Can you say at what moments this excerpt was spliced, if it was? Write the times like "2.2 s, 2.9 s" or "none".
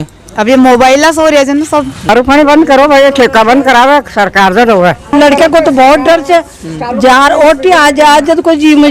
2.1 s, 5.1 s